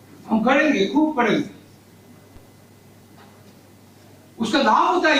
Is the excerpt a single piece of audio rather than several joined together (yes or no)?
yes